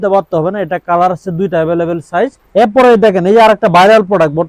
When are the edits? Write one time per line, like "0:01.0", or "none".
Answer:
0:02.4